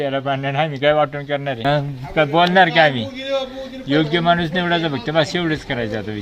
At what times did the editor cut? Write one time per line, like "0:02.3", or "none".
0:01.6